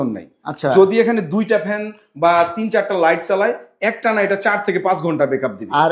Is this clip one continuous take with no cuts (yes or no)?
yes